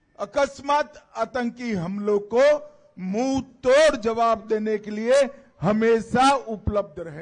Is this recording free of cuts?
yes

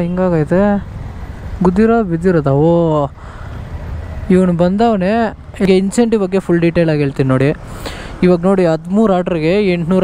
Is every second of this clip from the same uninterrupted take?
no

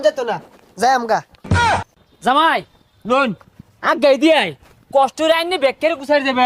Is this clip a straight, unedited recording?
yes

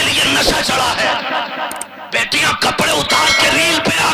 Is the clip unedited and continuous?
no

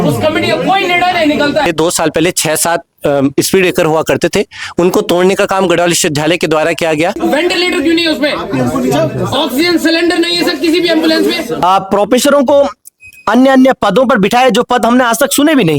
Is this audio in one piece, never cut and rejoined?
no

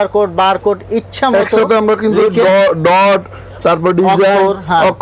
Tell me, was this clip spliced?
no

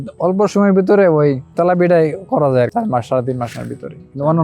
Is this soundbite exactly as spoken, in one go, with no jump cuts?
no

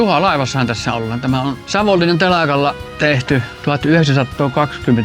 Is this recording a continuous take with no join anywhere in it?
no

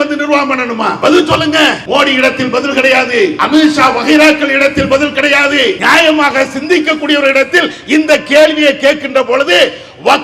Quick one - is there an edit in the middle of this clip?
yes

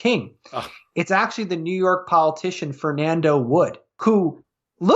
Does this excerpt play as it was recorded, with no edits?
no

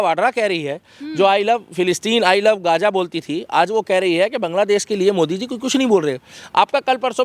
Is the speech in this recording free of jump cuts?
yes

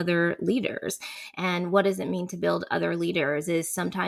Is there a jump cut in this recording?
no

